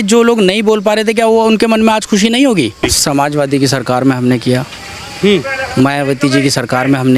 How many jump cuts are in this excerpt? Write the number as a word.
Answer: one